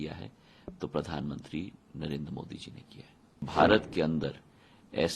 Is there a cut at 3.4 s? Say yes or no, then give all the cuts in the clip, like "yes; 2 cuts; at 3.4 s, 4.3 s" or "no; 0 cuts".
yes; 1 cut; at 3.4 s